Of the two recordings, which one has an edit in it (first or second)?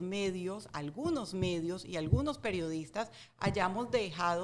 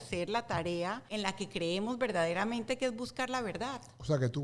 second